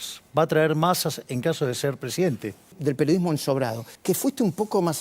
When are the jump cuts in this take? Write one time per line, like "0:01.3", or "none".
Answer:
0:02.8
0:03.9